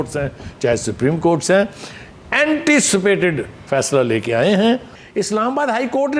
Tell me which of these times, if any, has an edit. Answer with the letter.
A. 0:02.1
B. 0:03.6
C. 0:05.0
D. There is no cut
C